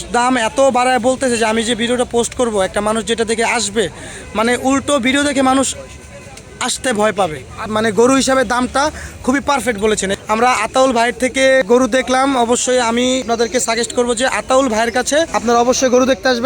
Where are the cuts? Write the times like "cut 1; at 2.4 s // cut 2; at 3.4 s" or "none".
cut 1; at 7.7 s // cut 2; at 10.2 s // cut 3; at 11.6 s // cut 4; at 13.2 s // cut 5; at 15.3 s